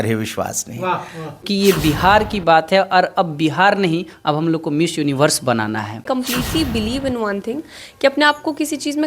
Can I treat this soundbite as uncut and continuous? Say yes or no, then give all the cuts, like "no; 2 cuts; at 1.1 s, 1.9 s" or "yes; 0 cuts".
no; 2 cuts; at 1.4 s, 6.0 s